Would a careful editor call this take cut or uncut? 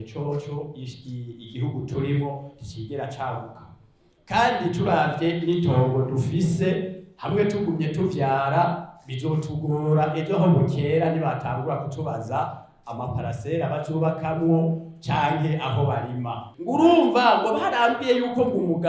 cut